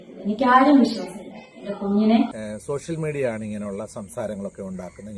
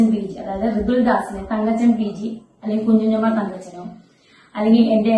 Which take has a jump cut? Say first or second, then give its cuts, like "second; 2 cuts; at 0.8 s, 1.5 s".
first; 1 cut; at 2.3 s